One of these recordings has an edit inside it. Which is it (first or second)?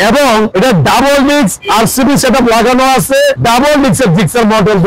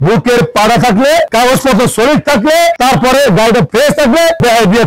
first